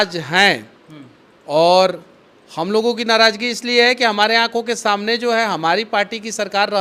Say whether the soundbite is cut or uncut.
uncut